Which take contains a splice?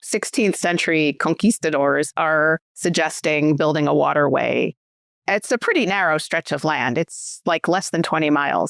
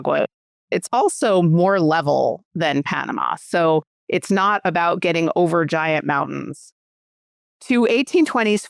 second; 1 cut; at 7.1 s

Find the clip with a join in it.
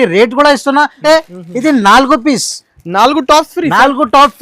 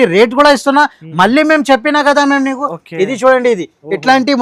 first; 1 cut; at 1.0 s

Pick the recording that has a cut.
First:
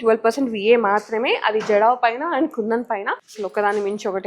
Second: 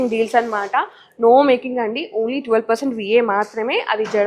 first; 1 cut; at 3.3 s

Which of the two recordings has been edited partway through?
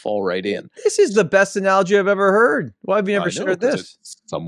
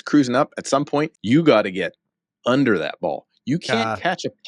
second; 1 cut; at 1.2 s

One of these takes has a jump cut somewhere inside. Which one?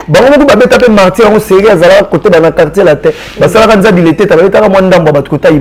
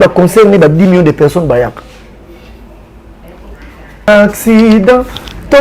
second; 1 cut; at 4.1 s

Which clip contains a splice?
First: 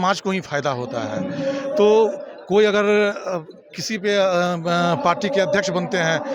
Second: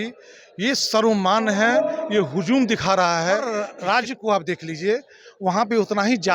second; 1 cut; at 3.6 s

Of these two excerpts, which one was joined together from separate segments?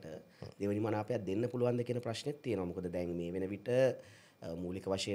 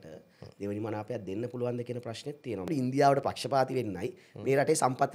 second; 1 cut; at 2.7 s

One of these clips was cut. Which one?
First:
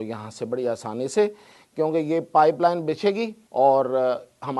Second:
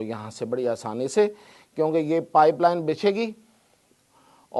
first; 1 cut; at 3.4 s

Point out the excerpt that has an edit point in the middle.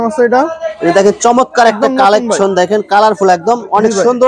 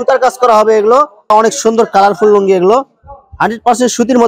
second; 1 cut; at 1.2 s

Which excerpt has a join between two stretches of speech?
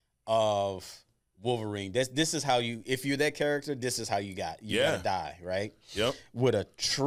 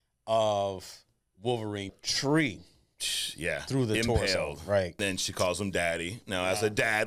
second; 2 cuts; at 1.9 s, 5.0 s

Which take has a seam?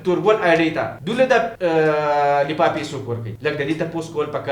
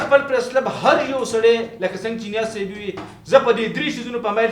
first; 3 cuts; at 1.0 s, 1.5 s, 3.3 s

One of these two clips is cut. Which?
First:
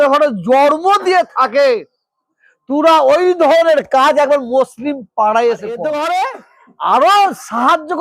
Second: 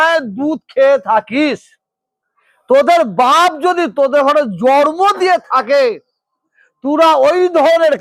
first; 1 cut; at 5.9 s

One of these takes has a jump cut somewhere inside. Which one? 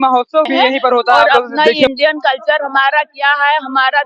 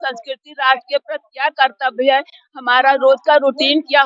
first; 1 cut; at 1.9 s

